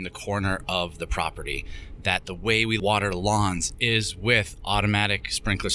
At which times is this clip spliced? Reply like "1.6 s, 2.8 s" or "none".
2.8 s